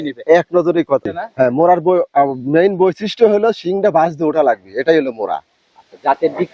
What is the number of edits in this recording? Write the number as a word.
one